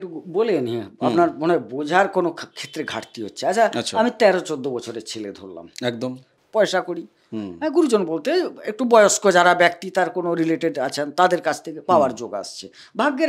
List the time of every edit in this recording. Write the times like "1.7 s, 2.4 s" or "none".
6.3 s